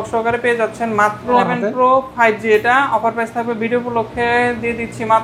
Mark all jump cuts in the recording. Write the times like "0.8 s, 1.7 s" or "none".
1.4 s

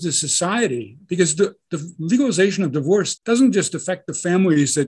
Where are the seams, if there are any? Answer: 3.1 s

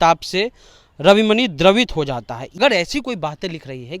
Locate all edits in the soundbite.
2.6 s

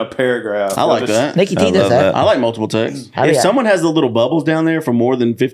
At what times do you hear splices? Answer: 3.0 s

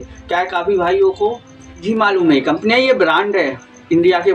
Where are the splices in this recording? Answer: 1.8 s

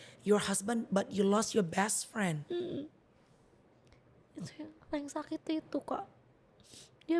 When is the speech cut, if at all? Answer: none

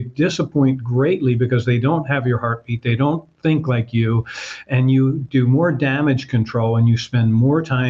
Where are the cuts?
none

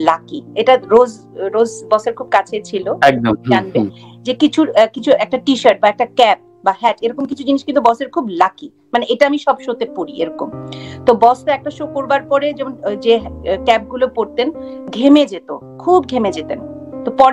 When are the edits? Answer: none

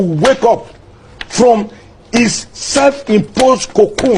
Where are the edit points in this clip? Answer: none

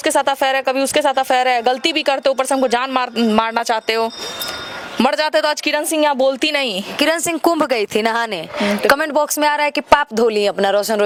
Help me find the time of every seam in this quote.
none

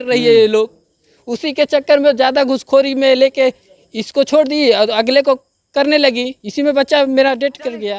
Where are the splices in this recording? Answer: none

